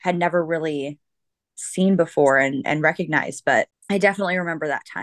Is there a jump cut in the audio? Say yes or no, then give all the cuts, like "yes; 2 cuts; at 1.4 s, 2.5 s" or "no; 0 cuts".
yes; 1 cut; at 3.8 s